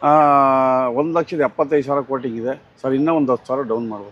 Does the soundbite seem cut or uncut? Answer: uncut